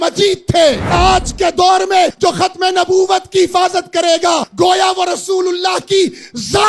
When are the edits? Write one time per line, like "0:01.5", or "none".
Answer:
0:00.9
0:02.1
0:04.5